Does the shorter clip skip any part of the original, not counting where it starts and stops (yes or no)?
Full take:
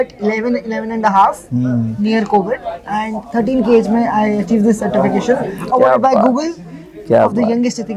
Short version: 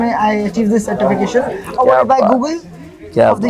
no